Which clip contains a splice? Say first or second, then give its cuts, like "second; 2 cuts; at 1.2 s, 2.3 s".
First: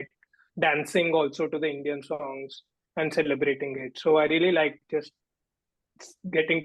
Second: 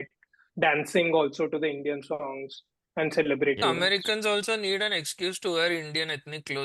second; 1 cut; at 3.6 s